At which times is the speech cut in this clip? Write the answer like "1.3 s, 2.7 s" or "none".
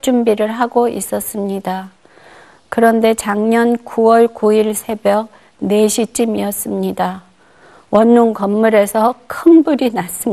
5.9 s